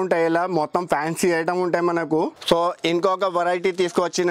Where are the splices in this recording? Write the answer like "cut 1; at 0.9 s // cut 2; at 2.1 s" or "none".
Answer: cut 1; at 2.4 s